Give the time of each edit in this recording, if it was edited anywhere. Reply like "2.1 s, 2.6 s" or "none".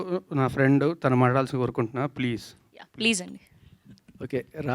none